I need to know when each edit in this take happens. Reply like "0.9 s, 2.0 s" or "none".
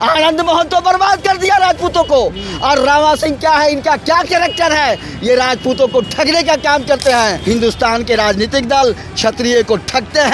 7.4 s